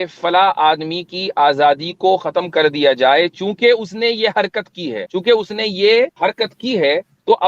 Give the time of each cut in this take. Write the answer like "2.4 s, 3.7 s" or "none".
5.0 s, 6.1 s